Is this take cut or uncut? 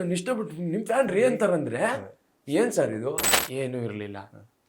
cut